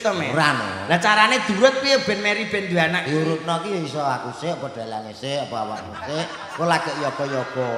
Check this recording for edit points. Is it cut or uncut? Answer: uncut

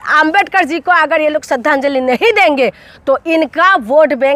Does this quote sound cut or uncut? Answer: uncut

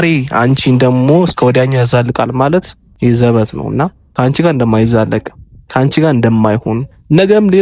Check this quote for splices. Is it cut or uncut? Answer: cut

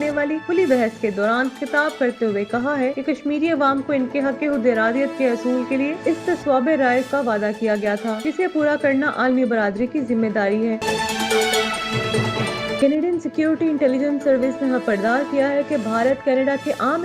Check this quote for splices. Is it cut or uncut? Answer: cut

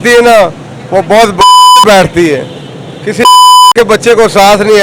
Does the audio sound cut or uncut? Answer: uncut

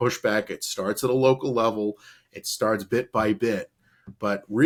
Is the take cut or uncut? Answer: uncut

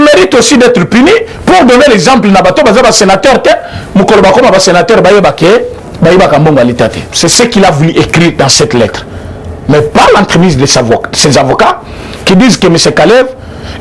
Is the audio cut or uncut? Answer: cut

